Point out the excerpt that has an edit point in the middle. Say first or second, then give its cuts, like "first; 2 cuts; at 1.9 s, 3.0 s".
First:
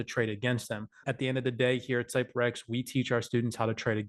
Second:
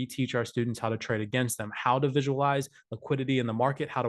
first; 1 cut; at 1.0 s